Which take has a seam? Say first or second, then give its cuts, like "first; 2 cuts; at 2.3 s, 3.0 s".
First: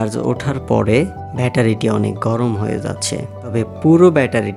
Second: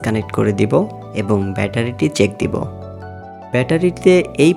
second; 1 cut; at 3.3 s